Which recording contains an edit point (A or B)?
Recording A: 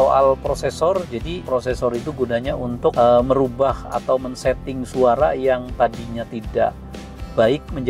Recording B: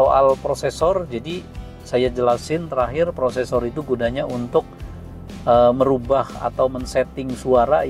A